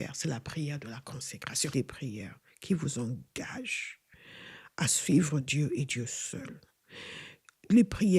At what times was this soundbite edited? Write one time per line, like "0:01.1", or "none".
0:01.7